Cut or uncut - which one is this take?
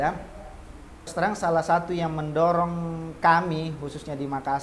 cut